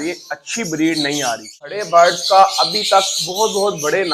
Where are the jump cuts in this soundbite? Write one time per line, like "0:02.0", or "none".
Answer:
0:01.8